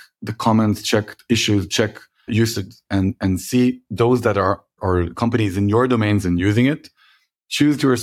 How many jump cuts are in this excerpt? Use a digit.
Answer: 3